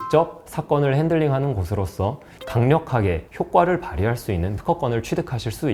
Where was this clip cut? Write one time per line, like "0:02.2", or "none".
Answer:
0:02.3